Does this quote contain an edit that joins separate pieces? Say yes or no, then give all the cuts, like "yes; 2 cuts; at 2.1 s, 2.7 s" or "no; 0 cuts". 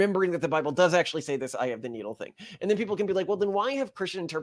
no; 0 cuts